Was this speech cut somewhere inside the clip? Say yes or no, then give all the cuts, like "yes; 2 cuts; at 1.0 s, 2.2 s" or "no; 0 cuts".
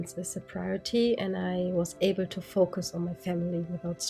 no; 0 cuts